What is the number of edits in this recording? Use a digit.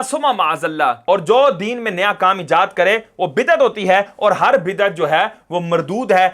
1